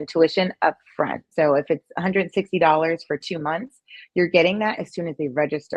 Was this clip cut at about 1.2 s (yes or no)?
yes